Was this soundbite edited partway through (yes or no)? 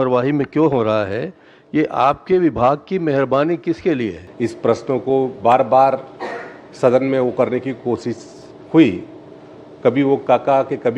yes